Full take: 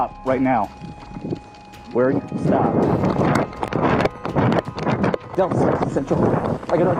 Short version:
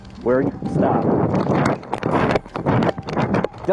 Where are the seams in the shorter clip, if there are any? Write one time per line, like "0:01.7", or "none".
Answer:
none